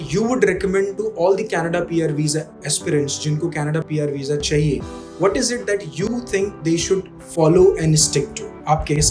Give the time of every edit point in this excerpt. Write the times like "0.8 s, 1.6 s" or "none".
none